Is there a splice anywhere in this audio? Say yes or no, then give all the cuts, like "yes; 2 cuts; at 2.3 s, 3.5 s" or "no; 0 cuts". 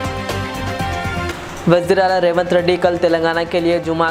no; 0 cuts